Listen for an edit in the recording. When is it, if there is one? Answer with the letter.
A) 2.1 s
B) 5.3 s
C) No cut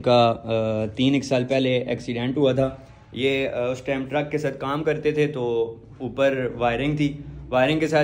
C